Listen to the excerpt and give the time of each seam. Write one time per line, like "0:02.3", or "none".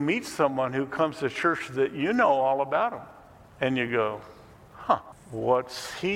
0:05.2